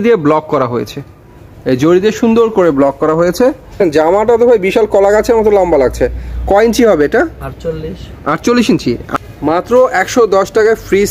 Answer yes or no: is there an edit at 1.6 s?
no